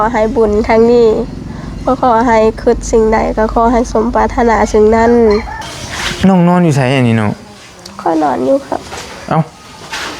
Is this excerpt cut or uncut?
cut